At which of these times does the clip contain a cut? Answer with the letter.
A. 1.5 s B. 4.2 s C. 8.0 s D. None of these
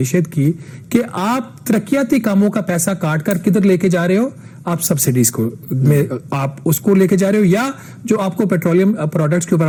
D